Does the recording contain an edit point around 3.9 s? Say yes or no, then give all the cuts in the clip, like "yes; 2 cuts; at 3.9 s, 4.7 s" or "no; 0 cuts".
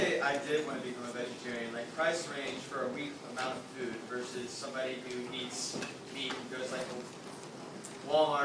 no; 0 cuts